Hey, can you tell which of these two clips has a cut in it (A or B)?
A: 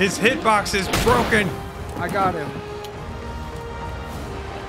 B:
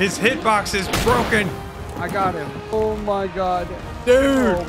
B